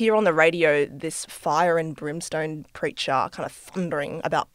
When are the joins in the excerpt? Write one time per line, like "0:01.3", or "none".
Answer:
none